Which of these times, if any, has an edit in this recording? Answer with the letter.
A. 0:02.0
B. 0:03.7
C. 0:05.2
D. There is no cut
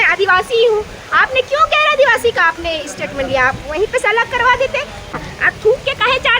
C